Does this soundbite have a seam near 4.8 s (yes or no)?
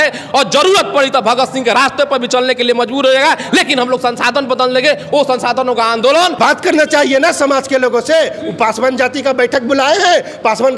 no